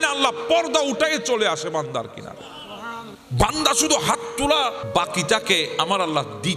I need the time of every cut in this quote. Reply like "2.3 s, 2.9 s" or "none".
3.2 s, 4.8 s

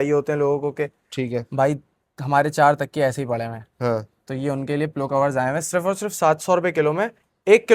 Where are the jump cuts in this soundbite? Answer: none

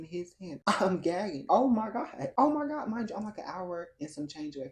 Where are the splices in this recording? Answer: none

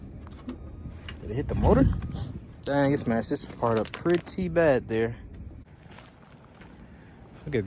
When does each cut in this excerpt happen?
5.8 s

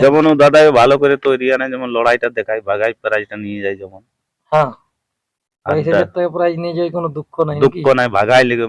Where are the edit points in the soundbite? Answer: none

